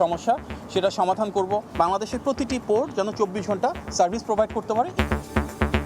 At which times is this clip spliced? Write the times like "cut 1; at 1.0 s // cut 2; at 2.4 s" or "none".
cut 1; at 1.7 s // cut 2; at 4.9 s